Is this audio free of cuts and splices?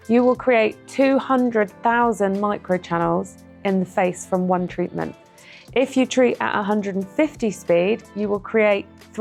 yes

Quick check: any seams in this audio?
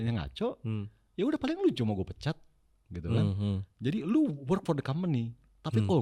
no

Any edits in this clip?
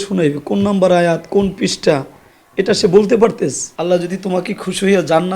yes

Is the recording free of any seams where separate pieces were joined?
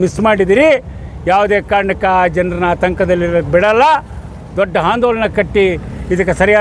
yes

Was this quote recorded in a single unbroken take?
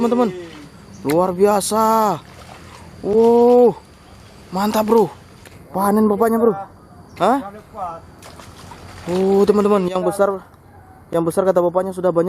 yes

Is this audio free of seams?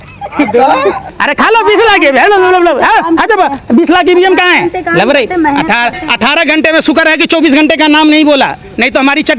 no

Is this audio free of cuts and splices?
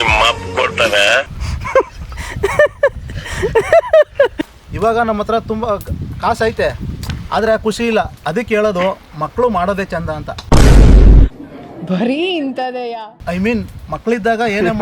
no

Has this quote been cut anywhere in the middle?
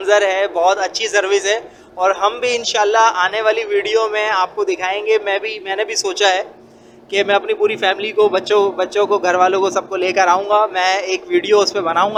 no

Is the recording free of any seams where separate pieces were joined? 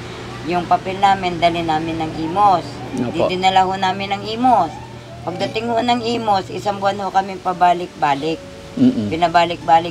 yes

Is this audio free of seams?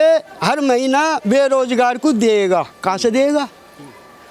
yes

